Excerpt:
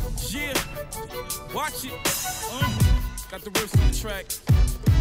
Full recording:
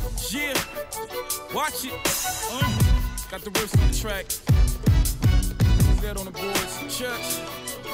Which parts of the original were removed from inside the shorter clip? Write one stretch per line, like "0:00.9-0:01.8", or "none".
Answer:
none